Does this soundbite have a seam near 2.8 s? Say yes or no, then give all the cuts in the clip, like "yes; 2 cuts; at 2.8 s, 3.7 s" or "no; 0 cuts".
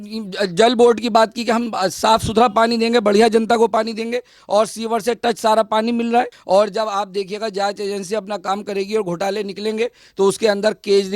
no; 1 cut; at 6.4 s